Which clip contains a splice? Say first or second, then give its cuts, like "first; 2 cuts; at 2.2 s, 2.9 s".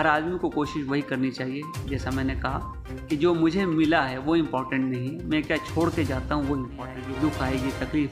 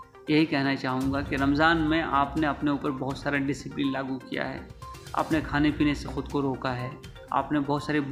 first; 1 cut; at 7.0 s